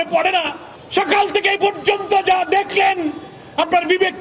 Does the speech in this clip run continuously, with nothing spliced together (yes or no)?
yes